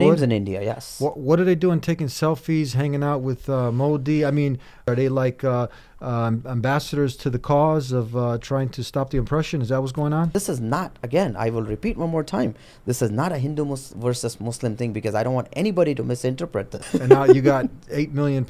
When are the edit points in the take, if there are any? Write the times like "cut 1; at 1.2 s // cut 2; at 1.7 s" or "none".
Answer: cut 1; at 4.8 s // cut 2; at 10.3 s // cut 3; at 16.8 s